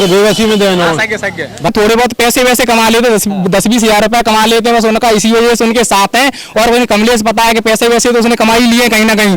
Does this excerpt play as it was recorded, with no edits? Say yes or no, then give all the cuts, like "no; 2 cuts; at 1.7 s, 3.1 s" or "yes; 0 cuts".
no; 1 cut; at 1.7 s